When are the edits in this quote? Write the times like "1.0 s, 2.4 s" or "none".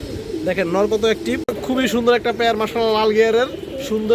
1.5 s